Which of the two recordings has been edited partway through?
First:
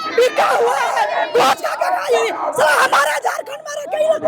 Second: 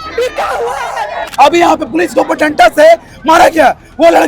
second; 1 cut; at 1.2 s

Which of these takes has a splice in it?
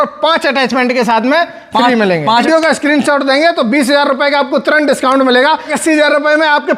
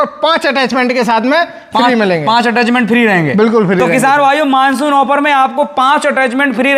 first; 2 cuts; at 2.4 s, 5.7 s

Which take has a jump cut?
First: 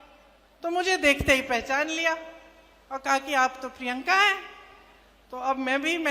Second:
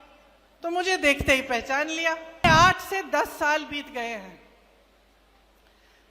second; 1 cut; at 2.4 s

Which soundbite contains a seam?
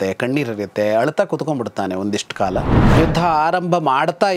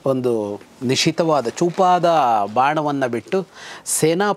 first; 1 cut; at 2.8 s

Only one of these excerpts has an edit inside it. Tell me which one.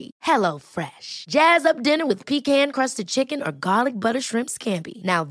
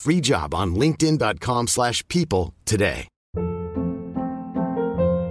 second; 1 cut; at 3.1 s

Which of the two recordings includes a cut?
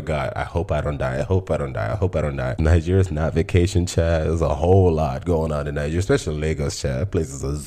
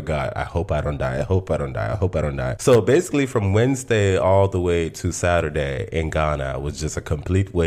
first; 1 cut; at 2.6 s

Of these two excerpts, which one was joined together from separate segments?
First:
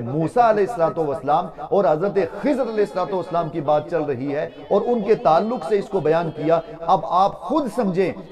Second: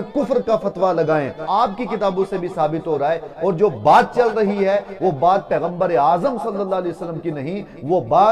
second; 1 cut; at 1.4 s

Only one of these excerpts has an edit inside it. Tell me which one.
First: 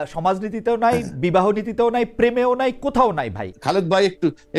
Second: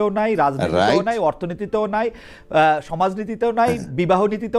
first; 1 cut; at 3.5 s

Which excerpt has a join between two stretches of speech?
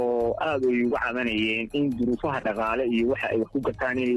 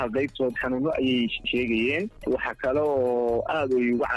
second; 2 cuts; at 1.4 s, 2.2 s

